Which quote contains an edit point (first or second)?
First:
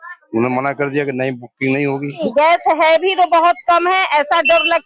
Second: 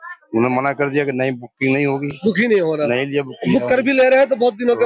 first